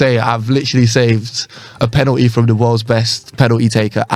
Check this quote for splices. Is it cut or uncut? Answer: uncut